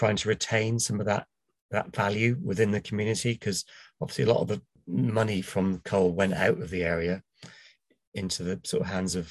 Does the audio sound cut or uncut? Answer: cut